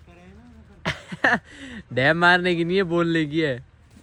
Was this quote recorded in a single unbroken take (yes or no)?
yes